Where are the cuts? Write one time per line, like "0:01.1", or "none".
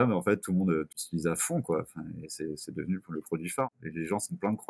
0:00.9
0:03.6